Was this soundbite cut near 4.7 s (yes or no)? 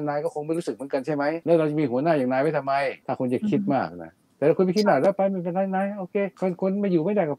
no